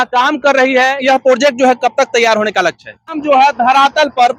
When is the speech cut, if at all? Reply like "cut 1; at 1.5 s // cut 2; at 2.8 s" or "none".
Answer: cut 1; at 1.0 s // cut 2; at 3.2 s